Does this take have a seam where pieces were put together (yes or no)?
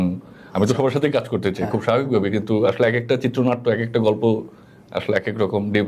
no